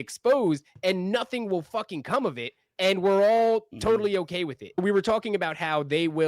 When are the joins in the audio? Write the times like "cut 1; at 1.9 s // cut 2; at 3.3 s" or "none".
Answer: cut 1; at 4.8 s